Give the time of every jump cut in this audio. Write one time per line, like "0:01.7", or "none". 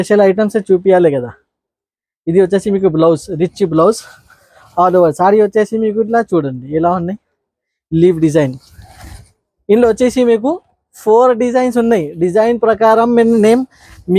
none